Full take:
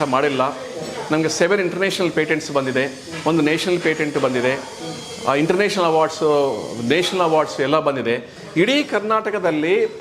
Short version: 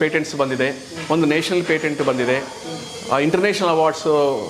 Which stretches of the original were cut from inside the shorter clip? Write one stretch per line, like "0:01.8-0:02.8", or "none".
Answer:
none